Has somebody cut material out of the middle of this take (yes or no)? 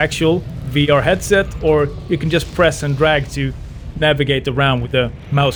no